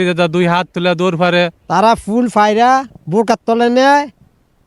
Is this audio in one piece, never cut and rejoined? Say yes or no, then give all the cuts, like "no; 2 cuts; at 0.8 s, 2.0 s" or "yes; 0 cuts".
no; 1 cut; at 1.6 s